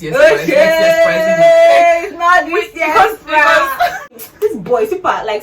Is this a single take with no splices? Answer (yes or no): no